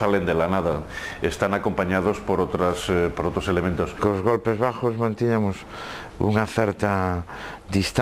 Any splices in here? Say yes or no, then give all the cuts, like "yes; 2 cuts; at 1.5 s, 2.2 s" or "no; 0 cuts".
no; 0 cuts